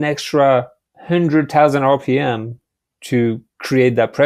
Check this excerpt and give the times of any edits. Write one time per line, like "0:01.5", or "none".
none